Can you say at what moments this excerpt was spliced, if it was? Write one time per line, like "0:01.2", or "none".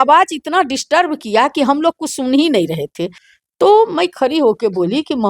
0:03.2